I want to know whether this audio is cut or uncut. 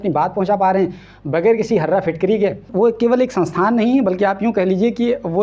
cut